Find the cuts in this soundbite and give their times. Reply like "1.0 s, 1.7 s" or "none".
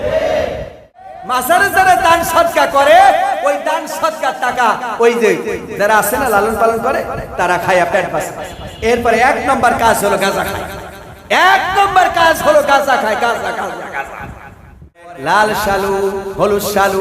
1.0 s, 15.0 s